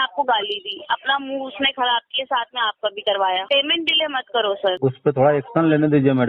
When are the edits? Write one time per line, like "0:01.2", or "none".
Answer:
0:03.4
0:04.8

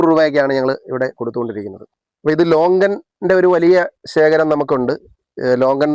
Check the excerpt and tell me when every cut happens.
0:01.8

